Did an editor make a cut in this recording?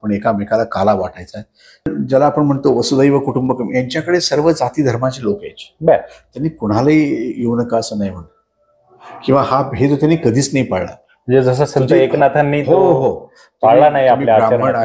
yes; 1 cut; at 1.9 s

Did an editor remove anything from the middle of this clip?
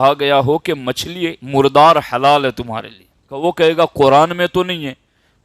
yes; 2 cuts; at 1.4 s, 3.3 s

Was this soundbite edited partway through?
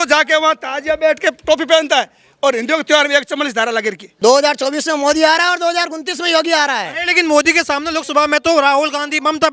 yes; 1 cut; at 4.0 s

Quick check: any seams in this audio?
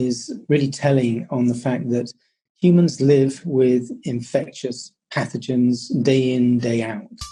no; 0 cuts

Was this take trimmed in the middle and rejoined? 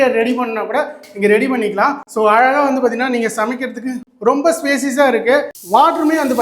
no; 0 cuts

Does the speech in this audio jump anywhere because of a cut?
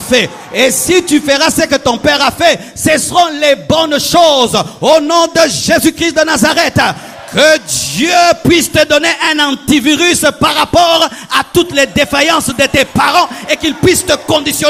no; 0 cuts

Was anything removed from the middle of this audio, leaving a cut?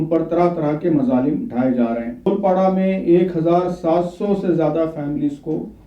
yes; 1 cut; at 2.3 s

